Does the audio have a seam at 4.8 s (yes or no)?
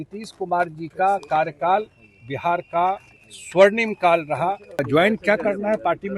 yes